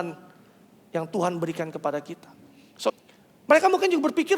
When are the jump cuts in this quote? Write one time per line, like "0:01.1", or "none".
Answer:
0:02.9